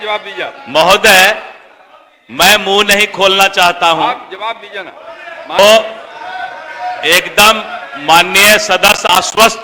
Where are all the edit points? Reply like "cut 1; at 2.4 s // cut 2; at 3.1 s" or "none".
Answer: cut 1; at 5.6 s